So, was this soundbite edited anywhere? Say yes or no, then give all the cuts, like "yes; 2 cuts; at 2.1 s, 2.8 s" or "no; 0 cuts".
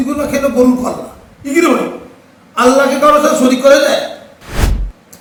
no; 0 cuts